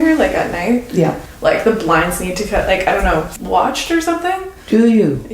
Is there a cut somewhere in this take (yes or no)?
yes